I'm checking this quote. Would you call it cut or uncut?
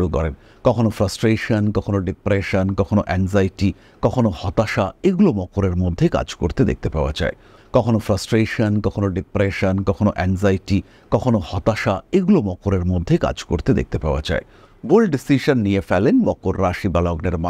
cut